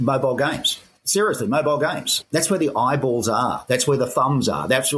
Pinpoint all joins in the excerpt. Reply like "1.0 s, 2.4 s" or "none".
0.9 s, 2.1 s